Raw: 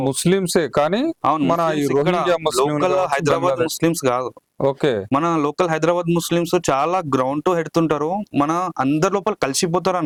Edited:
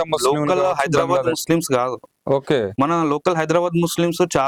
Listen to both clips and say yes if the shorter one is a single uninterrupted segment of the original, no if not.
yes